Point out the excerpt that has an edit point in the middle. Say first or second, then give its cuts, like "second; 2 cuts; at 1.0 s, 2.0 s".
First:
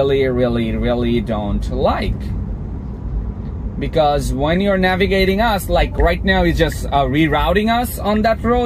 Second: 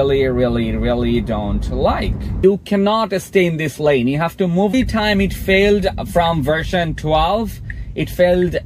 second; 2 cuts; at 2.4 s, 4.7 s